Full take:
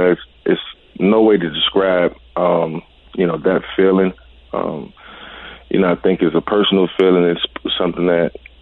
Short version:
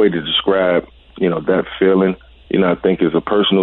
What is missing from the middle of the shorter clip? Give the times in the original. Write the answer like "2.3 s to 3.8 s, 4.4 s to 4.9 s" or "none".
2.2 s to 2.9 s, 4.3 s to 5.5 s